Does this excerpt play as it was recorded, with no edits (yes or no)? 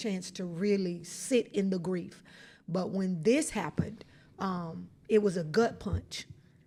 yes